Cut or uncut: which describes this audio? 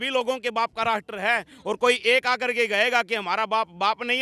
uncut